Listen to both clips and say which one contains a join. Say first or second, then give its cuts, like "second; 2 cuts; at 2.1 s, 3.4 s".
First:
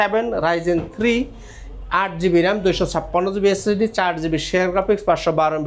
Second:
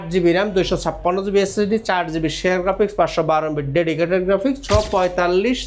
second; 1 cut; at 4.6 s